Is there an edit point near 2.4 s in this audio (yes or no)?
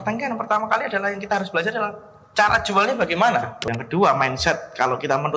no